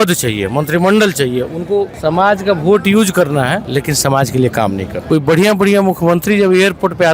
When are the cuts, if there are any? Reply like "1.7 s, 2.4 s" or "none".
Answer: 1.9 s, 3.6 s, 4.9 s